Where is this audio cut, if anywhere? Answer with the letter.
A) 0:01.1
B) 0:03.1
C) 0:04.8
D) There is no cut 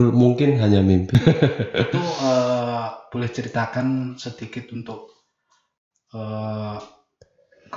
A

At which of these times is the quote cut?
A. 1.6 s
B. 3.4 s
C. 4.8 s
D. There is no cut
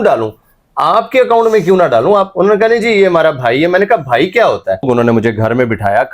C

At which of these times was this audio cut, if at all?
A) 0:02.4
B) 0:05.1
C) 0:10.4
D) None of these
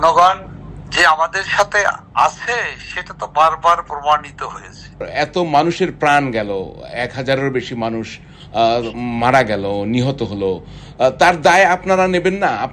B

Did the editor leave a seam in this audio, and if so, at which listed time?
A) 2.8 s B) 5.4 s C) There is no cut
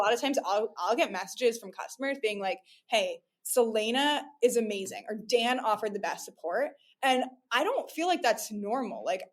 C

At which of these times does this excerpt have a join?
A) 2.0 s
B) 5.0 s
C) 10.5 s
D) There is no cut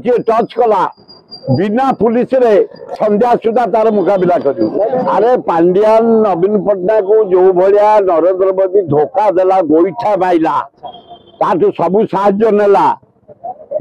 B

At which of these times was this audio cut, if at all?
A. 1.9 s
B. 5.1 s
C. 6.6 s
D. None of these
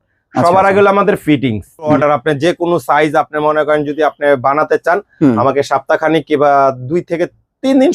A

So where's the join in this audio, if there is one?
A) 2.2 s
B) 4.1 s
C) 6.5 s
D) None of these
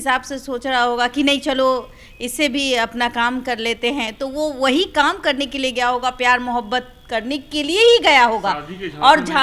D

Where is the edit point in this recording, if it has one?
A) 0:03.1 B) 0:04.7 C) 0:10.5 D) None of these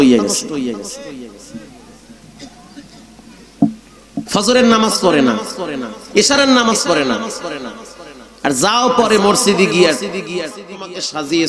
C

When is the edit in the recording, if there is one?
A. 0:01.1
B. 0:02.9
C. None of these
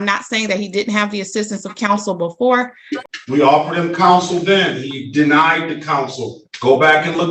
B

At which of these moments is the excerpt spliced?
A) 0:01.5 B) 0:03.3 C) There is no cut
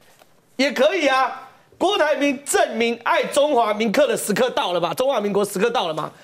C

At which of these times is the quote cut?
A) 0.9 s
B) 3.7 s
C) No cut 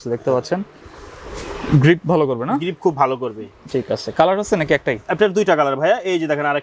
C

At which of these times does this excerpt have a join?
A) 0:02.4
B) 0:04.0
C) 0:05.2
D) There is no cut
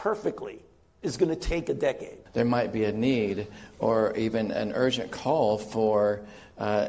A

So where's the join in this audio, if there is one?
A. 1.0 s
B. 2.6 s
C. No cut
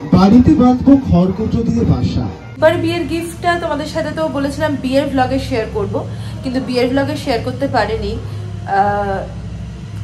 B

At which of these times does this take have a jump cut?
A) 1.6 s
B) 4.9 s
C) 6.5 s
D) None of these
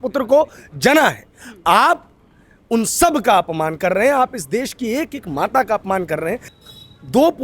C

